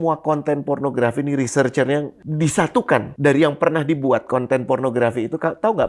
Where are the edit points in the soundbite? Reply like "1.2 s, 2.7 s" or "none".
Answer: 2.2 s, 3.1 s